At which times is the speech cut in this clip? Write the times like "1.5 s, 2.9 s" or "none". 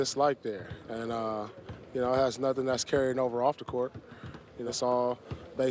4.7 s